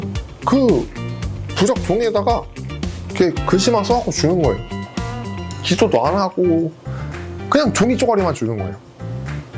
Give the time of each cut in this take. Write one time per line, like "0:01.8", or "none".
none